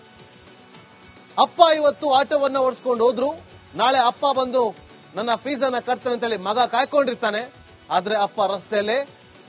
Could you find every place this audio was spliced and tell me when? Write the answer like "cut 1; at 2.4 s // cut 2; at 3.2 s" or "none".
none